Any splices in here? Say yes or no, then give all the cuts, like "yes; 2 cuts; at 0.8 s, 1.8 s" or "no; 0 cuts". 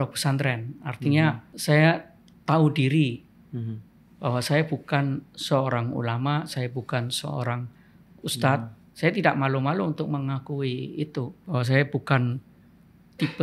yes; 2 cuts; at 1.5 s, 11.4 s